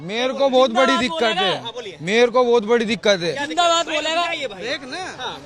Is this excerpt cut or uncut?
uncut